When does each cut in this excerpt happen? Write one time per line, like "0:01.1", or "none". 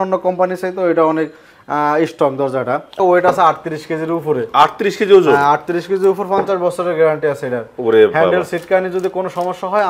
0:03.0